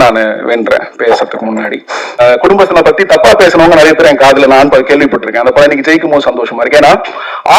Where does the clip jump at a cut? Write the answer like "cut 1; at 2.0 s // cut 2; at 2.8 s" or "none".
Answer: cut 1; at 2.2 s

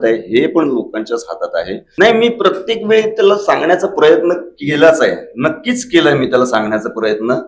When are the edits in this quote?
cut 1; at 1.8 s

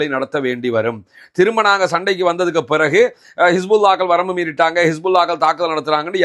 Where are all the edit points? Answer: none

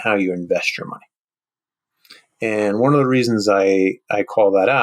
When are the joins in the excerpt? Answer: none

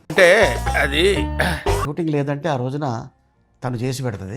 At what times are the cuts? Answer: cut 1; at 1.9 s

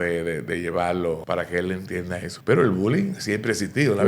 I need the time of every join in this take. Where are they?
cut 1; at 1.2 s // cut 2; at 2.3 s

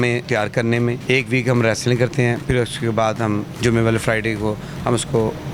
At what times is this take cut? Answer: none

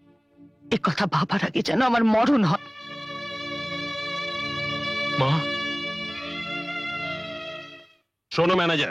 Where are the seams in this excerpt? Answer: none

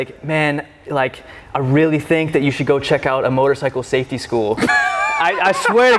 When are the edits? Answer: none

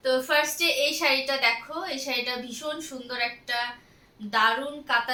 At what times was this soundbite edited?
none

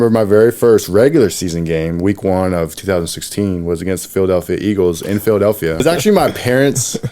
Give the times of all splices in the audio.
cut 1; at 5.8 s

